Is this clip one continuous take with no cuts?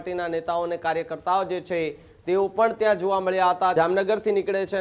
no; 1 cut; at 3.7 s

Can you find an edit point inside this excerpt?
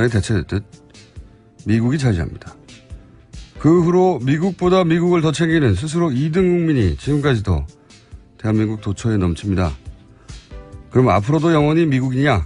yes; 1 cut; at 7.0 s

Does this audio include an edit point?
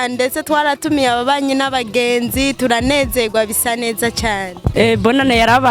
yes; 1 cut; at 4.6 s

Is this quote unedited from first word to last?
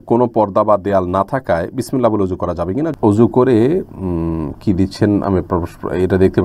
no; 1 cut; at 2.9 s

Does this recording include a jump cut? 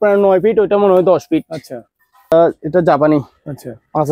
yes; 1 cut; at 2.3 s

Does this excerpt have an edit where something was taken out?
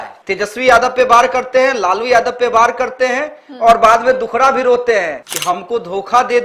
yes; 1 cut; at 5.2 s

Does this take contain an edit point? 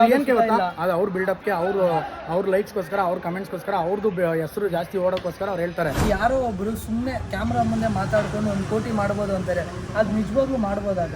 yes; 1 cut; at 6.0 s

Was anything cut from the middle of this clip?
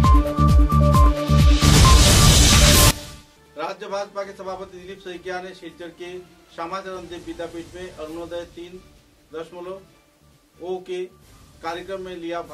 yes; 1 cut; at 3.1 s

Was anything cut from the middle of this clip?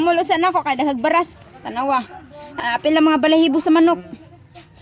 yes; 1 cut; at 2.6 s

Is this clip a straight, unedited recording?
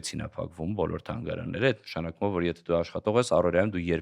yes; 0 cuts

